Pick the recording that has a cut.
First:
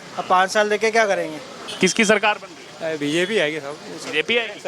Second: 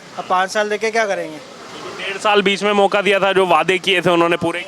first; 1 cut; at 1.7 s

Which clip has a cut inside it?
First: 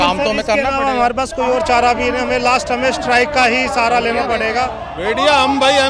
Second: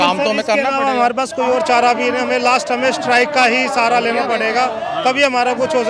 first; 1 cut; at 4.8 s

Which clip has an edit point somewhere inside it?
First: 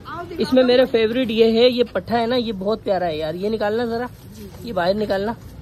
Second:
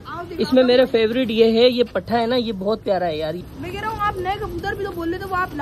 second; 1 cut; at 3.4 s

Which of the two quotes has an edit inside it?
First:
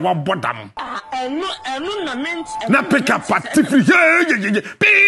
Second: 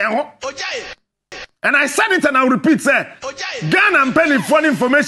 second; 1 cut; at 1.5 s

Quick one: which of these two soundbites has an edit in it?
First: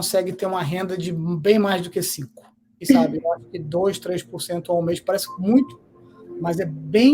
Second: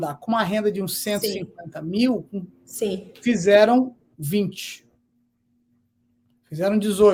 first; 1 cut; at 2.7 s

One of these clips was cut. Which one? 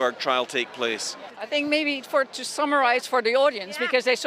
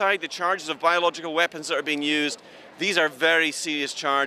first; 1 cut; at 1.3 s

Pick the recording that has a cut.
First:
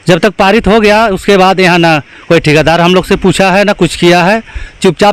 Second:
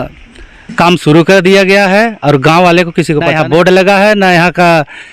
second; 1 cut; at 3.3 s

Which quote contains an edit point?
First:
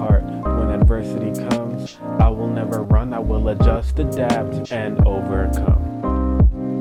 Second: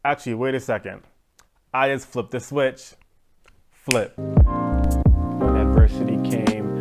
second; 1 cut; at 4.2 s

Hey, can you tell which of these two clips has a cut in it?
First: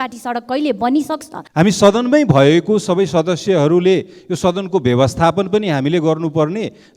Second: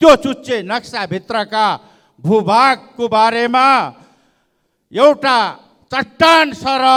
first; 1 cut; at 1.3 s

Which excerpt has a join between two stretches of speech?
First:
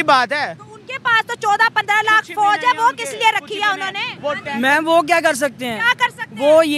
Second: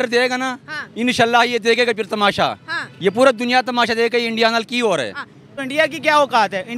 second; 1 cut; at 5.6 s

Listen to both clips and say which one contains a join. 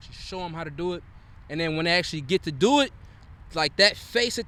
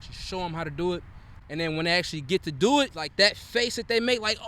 second; 1 cut; at 3.0 s

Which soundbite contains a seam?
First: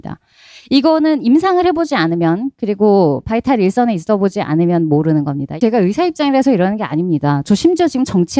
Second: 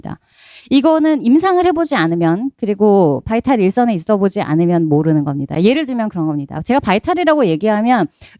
first; 1 cut; at 5.6 s

